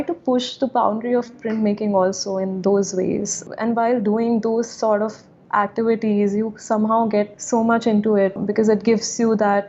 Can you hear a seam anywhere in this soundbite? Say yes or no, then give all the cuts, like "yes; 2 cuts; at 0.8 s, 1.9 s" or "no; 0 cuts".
yes; 3 cuts; at 3.4 s, 7.4 s, 8.4 s